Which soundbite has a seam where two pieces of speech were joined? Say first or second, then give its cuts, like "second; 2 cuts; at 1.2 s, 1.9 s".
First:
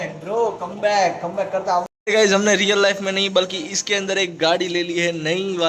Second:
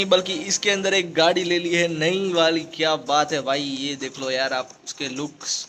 first; 1 cut; at 1.9 s